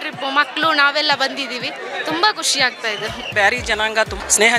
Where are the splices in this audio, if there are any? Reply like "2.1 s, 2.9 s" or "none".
3.3 s